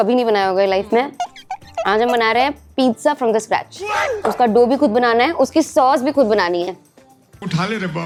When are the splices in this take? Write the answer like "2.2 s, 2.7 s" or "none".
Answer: none

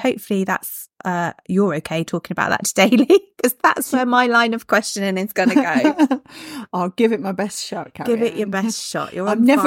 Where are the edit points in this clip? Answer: none

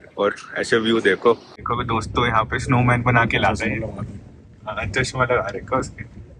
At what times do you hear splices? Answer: 1.6 s

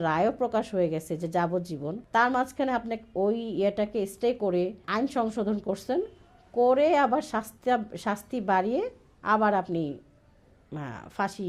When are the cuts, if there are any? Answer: 2.0 s, 4.8 s

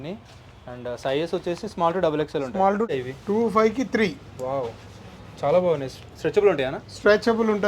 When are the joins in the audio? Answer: 2.9 s

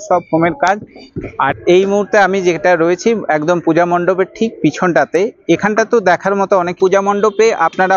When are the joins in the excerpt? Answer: 1.6 s, 6.8 s

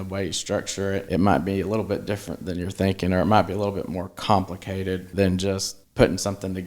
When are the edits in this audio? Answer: 1.1 s, 5.1 s, 5.8 s

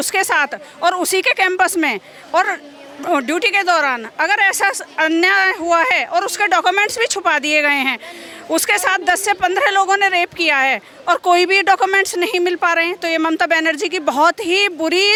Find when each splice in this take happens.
none

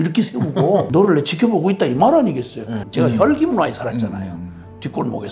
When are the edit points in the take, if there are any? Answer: 0.9 s, 2.8 s

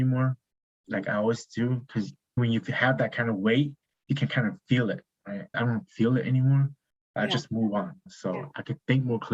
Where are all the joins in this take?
none

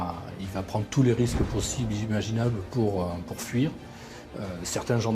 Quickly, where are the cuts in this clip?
none

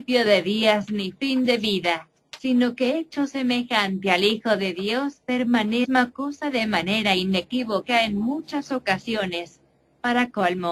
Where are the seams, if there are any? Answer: none

